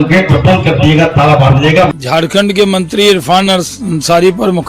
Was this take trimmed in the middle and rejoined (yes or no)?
yes